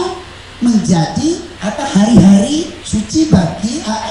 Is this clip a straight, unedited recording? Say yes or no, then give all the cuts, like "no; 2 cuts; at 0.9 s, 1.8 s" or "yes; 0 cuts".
no; 2 cuts; at 1.5 s, 2.8 s